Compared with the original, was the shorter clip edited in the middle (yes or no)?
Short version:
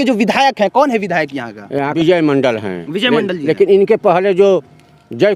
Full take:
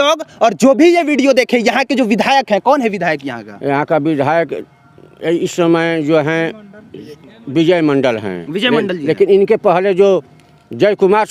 yes